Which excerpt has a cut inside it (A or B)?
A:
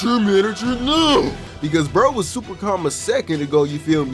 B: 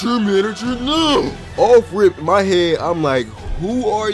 A